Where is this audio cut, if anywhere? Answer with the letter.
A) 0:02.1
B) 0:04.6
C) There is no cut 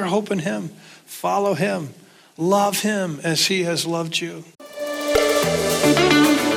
B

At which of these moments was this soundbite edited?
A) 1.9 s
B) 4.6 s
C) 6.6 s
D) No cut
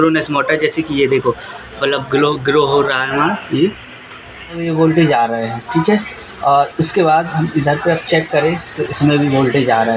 B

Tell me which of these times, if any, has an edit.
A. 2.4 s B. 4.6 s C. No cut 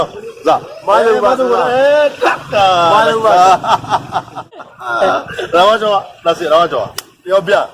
B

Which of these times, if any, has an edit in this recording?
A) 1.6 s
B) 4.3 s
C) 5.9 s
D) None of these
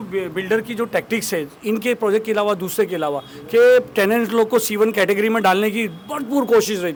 D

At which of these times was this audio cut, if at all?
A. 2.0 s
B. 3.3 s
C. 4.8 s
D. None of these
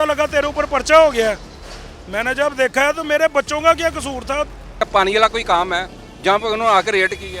C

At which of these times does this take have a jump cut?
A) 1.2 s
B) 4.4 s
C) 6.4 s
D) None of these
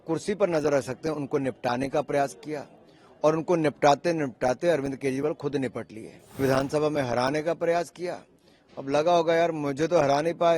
C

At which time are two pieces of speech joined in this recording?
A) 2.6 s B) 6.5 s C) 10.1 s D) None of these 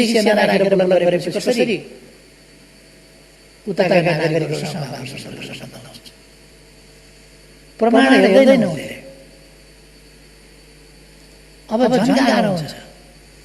B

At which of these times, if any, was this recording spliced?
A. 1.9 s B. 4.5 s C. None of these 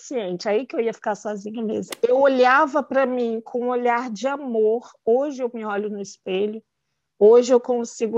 A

